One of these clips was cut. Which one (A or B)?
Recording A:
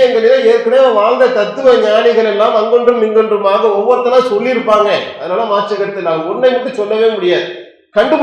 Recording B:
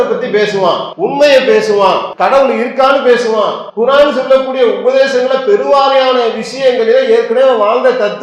B